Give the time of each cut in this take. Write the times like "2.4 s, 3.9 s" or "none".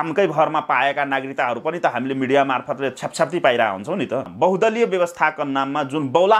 4.3 s